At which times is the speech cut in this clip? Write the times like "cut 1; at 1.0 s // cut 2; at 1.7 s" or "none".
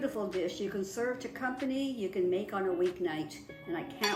none